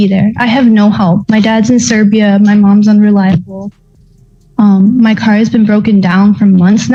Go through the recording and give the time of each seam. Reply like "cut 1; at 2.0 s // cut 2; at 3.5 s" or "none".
none